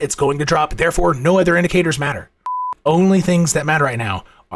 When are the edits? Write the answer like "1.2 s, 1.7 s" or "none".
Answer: 2.5 s